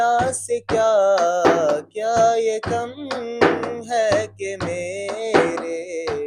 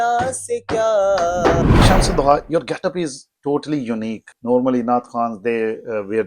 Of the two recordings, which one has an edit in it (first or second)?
second